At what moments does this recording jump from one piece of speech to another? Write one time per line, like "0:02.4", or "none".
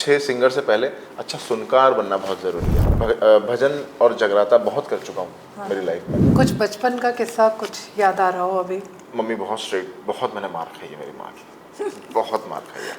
0:02.8
0:06.2
0:09.0